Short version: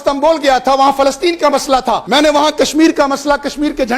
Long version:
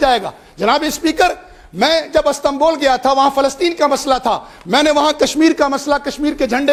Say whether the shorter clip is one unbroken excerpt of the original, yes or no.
no